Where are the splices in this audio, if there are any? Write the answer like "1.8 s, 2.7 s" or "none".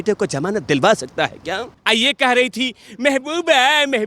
1.7 s

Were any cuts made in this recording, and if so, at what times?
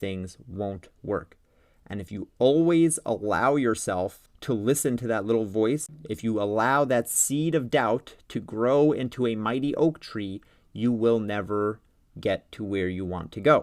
4.3 s, 5.9 s

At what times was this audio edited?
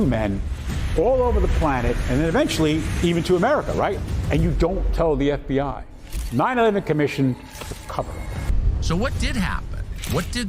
8.5 s

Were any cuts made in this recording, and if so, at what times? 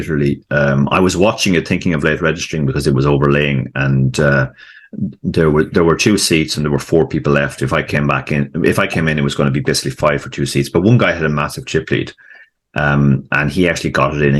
none

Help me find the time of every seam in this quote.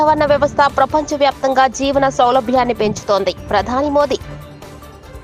4.3 s

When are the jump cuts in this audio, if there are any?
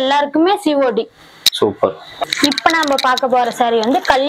2.2 s

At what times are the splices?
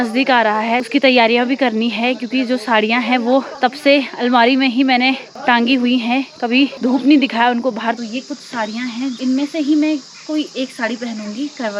0.8 s, 3.5 s, 5.3 s, 6.8 s, 8.0 s, 9.2 s

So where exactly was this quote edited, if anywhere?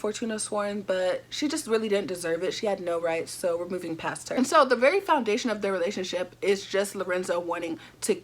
4.3 s

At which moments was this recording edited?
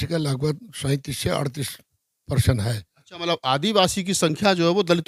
none

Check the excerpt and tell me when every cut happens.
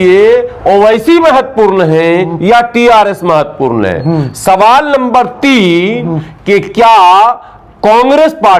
none

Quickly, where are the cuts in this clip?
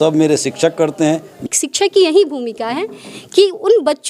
1.4 s

